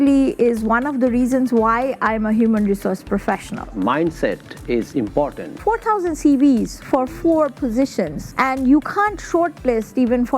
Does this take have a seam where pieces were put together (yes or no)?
yes